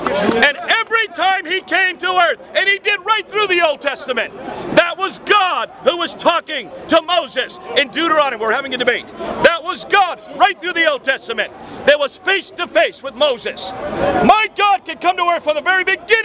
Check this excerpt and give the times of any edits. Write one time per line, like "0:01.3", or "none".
none